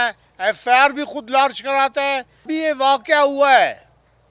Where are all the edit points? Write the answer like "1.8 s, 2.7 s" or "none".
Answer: 2.3 s